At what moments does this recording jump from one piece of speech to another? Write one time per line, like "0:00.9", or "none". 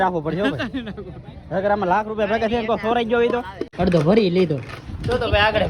0:03.6